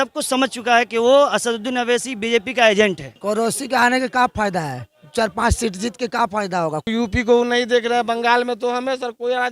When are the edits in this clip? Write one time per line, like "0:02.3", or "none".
0:03.1
0:06.9